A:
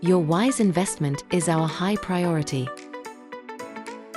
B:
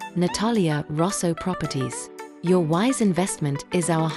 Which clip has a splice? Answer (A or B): A